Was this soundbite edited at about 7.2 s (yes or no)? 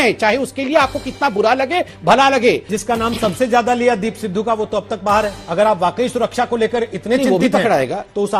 no